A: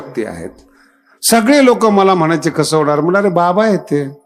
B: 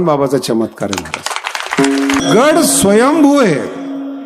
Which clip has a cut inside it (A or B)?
B